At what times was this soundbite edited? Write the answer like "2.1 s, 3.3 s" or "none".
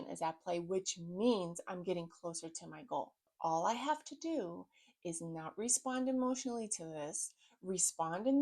3.3 s